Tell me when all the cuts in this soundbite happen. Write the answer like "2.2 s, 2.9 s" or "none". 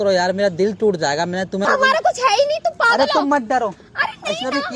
1.7 s